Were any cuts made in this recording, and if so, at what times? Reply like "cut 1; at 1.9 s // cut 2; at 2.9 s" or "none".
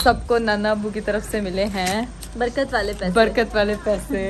none